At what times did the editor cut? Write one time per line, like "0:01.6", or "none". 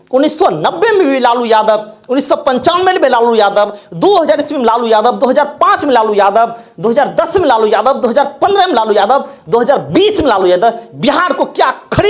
none